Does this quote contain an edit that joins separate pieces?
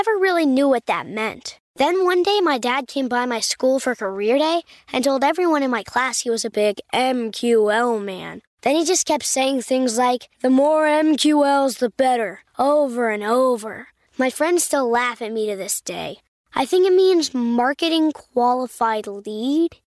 no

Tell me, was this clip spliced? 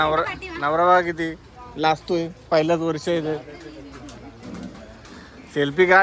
no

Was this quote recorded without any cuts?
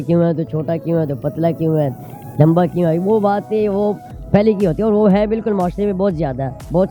yes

